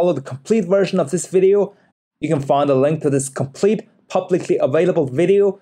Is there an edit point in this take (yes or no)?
yes